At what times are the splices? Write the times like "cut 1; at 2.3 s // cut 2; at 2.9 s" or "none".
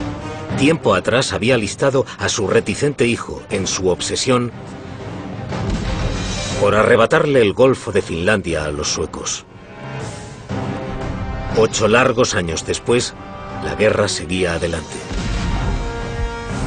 none